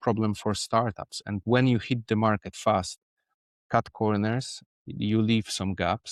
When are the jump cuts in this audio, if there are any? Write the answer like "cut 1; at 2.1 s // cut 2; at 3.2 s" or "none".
none